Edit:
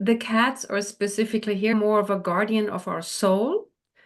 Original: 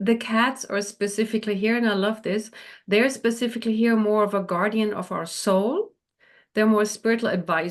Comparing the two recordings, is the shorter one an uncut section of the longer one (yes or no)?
no